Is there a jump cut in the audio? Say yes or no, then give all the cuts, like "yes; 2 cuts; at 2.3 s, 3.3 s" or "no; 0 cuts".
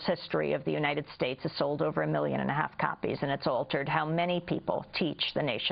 yes; 1 cut; at 4.3 s